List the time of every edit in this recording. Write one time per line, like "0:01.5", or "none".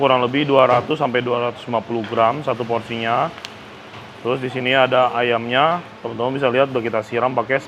none